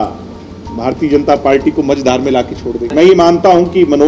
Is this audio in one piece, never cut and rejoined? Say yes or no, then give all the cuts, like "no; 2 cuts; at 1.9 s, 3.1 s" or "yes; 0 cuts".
no; 1 cut; at 2.9 s